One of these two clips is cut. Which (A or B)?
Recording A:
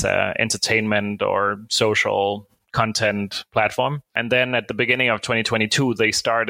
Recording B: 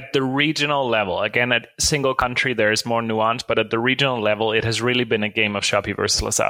A